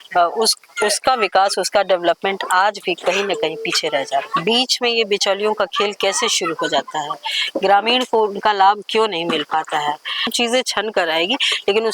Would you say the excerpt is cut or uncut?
cut